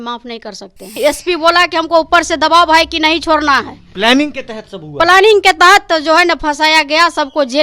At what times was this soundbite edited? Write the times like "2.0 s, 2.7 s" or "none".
1.0 s

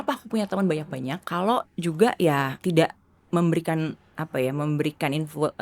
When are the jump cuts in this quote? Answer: 1.2 s, 2.5 s

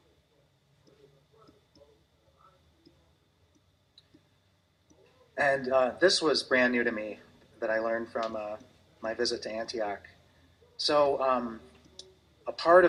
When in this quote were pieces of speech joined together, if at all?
none

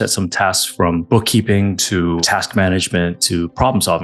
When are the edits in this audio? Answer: 1.0 s, 2.2 s

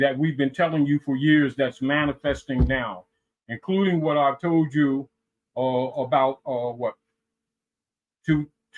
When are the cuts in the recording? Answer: none

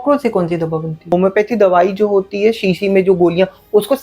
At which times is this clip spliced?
1.1 s

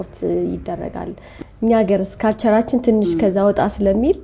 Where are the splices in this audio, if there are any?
1.3 s

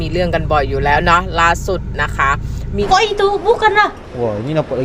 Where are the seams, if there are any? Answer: 2.9 s

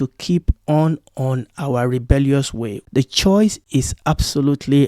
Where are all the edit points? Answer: 2.8 s, 3.8 s

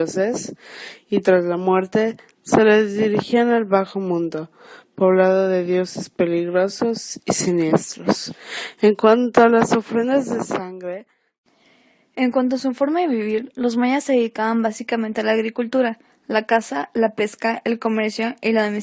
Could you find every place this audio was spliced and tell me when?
11.3 s

